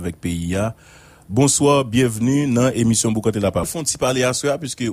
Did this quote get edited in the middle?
yes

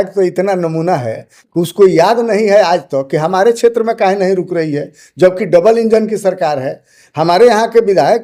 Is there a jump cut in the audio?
no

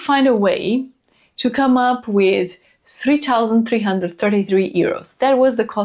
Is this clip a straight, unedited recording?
yes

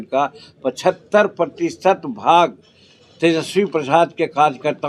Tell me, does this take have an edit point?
no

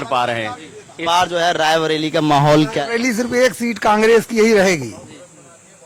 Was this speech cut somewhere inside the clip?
yes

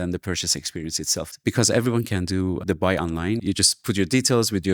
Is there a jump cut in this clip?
no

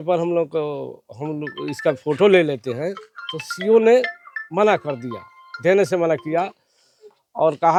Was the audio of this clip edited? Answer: no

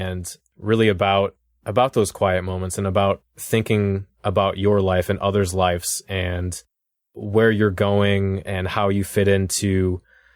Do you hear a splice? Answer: no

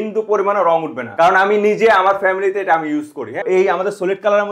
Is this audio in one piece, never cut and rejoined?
no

